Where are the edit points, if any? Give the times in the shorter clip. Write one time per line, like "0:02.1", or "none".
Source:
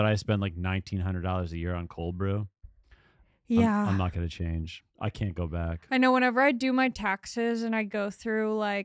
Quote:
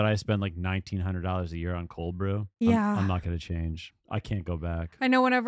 0:02.5